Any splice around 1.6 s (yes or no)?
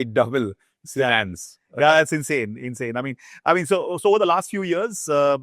no